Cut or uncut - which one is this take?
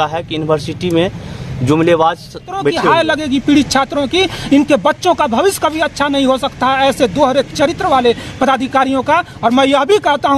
cut